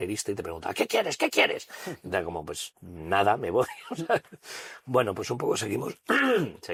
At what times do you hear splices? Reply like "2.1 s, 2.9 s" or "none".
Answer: none